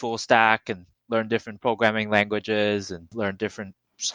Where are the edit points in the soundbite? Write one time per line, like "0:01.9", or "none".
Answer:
0:03.1